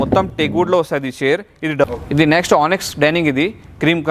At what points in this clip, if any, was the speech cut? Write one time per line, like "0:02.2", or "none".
0:01.8